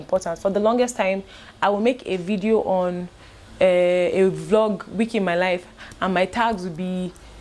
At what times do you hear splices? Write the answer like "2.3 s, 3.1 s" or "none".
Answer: none